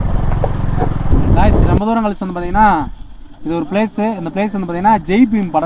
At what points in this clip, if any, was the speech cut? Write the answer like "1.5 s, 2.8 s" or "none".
1.8 s